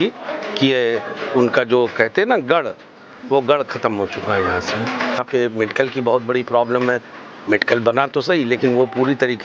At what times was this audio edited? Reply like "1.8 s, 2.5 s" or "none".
5.2 s